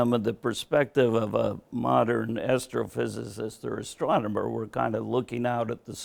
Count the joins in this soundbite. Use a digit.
0